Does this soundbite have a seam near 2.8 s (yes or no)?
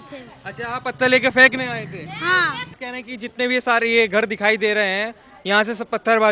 yes